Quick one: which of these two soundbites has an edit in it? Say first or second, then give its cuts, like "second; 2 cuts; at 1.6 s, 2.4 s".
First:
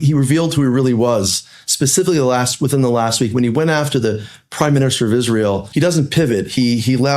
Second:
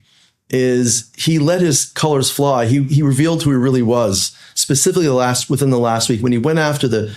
first; 1 cut; at 5.6 s